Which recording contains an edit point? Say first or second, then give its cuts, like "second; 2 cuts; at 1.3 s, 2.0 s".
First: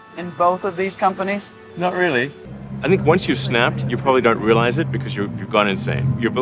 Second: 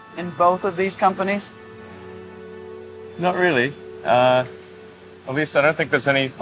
first; 2 cuts; at 1.6 s, 2.4 s